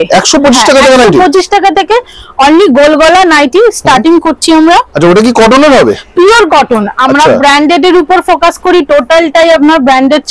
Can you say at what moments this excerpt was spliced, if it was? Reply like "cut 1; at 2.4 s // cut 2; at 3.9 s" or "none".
none